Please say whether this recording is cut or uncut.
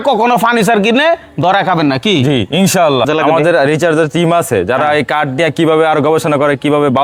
uncut